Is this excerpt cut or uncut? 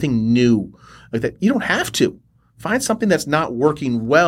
uncut